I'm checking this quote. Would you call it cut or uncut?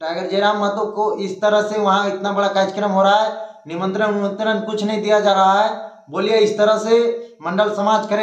uncut